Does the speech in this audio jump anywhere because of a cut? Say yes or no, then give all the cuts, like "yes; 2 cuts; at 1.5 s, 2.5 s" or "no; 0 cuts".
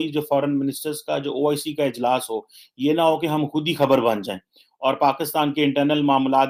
no; 0 cuts